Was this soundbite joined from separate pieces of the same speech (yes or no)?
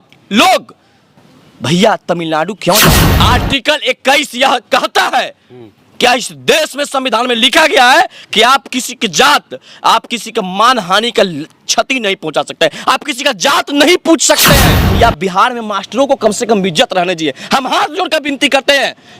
yes